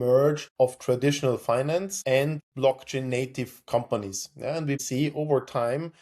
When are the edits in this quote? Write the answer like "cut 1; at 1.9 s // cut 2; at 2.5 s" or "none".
cut 1; at 2.3 s // cut 2; at 4.8 s